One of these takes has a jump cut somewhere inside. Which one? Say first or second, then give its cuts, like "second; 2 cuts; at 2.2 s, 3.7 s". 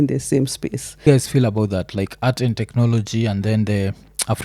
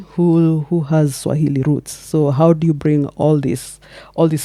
first; 1 cut; at 1.0 s